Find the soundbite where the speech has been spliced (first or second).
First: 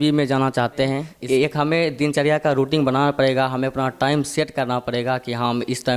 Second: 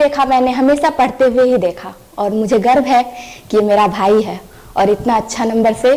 first